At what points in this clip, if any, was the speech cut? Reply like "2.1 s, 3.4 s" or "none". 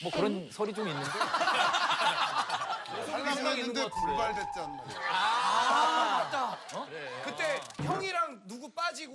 3.0 s